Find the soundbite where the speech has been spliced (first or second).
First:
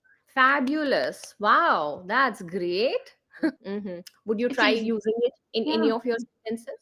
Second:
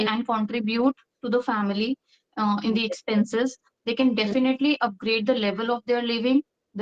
first